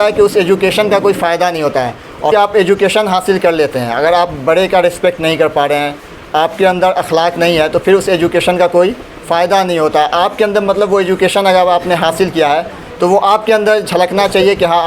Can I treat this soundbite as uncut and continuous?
no; 1 cut; at 2.3 s

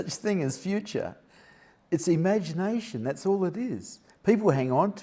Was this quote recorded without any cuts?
yes; 0 cuts

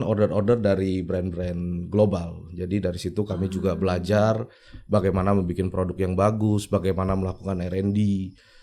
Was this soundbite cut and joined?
no; 0 cuts

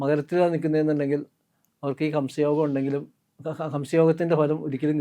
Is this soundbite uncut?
yes; 0 cuts

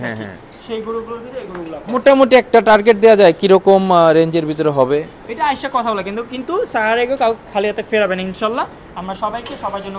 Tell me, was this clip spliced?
no; 0 cuts

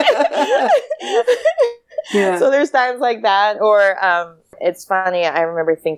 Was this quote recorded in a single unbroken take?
no; 1 cut; at 4.5 s

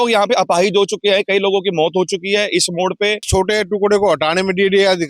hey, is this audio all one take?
no; 1 cut; at 3.3 s

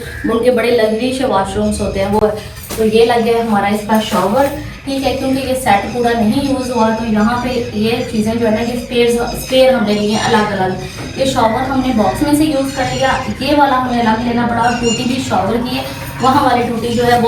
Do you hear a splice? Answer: no; 0 cuts

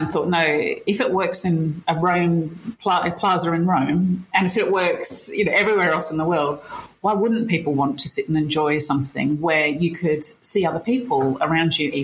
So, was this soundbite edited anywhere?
no; 0 cuts

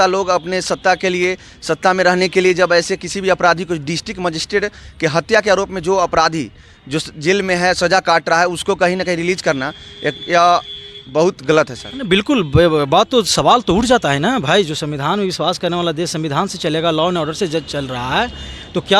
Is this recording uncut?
yes; 0 cuts

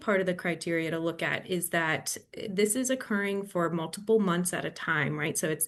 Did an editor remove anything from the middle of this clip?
no; 0 cuts

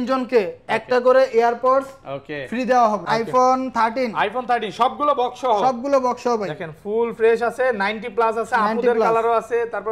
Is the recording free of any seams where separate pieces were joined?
no; 1 cut; at 3.0 s

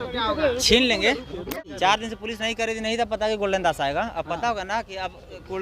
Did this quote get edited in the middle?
yes; 1 cut; at 1.5 s

